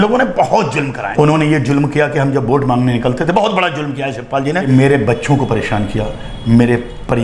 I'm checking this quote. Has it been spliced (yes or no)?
yes